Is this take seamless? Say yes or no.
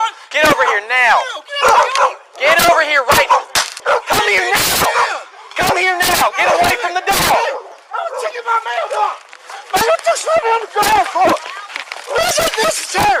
no